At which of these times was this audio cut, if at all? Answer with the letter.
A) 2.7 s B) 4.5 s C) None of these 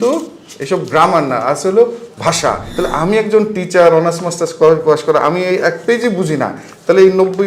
A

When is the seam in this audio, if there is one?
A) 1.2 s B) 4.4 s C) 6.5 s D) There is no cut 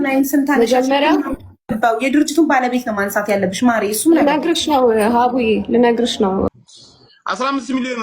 C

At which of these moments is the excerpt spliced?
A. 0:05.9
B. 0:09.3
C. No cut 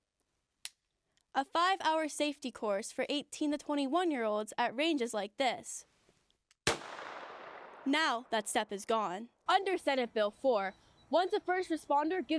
B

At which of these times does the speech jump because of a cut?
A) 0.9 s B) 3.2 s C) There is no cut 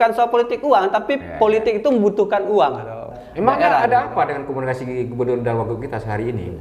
B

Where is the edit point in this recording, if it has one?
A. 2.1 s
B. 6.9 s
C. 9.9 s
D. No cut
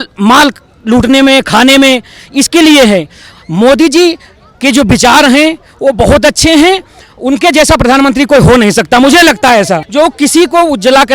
C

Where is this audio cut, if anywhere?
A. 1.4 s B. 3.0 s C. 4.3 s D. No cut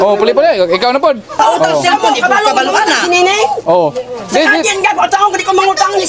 A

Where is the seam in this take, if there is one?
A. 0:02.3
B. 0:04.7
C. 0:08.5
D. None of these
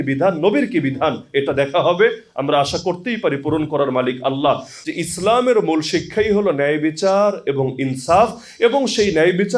B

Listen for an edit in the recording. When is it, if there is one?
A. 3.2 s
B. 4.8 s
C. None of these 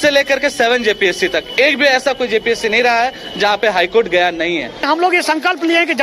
B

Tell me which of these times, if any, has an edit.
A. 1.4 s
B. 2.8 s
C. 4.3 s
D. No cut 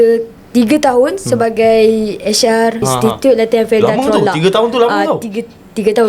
B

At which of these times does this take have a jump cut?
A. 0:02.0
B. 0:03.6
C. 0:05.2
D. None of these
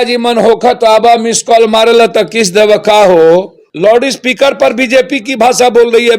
B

